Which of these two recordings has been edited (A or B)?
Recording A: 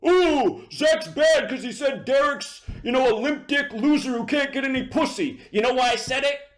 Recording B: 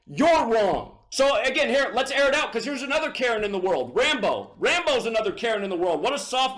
B